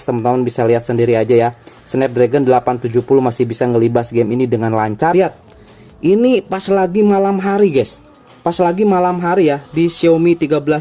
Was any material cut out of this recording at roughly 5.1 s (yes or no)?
yes